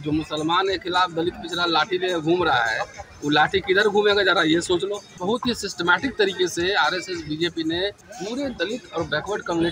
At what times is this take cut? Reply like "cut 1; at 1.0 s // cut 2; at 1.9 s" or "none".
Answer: cut 1; at 5.1 s // cut 2; at 8.1 s